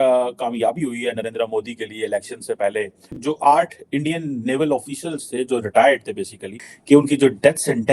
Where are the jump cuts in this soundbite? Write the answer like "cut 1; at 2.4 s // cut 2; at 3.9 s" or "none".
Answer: cut 1; at 6.5 s